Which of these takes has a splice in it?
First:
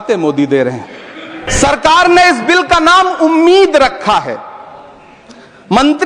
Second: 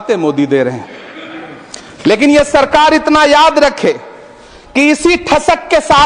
first; 1 cut; at 1.5 s

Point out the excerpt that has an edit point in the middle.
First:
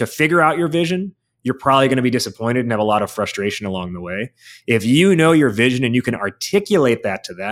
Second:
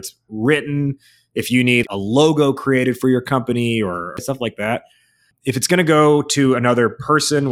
second; 2 cuts; at 1.9 s, 4.3 s

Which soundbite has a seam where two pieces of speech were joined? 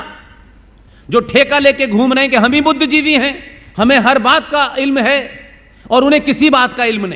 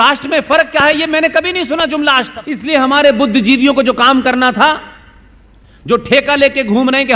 second; 1 cut; at 2.7 s

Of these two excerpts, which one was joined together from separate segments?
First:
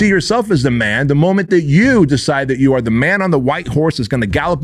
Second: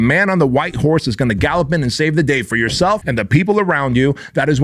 second; 1 cut; at 3.1 s

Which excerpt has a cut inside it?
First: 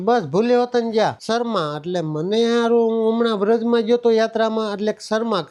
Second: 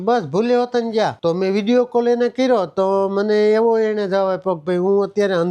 second; 1 cut; at 1.2 s

